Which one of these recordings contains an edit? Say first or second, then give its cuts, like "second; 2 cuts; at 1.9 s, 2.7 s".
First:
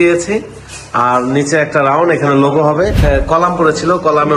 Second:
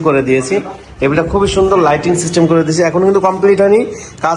first; 1 cut; at 3.1 s